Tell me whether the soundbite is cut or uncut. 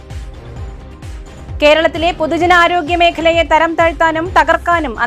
uncut